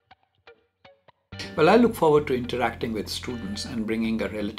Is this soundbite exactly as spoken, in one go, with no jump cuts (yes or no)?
no